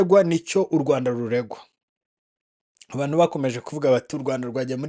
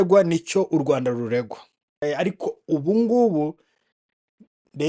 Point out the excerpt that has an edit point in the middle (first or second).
second